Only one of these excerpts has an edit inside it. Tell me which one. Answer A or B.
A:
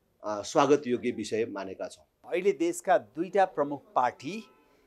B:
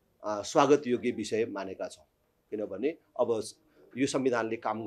A